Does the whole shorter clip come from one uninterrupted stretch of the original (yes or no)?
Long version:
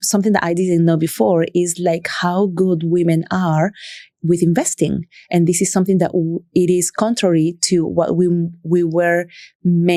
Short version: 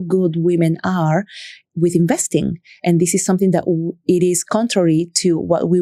yes